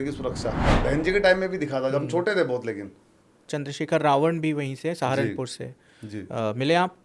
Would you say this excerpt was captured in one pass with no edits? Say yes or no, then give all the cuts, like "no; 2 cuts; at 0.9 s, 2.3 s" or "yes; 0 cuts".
no; 2 cuts; at 0.8 s, 3.5 s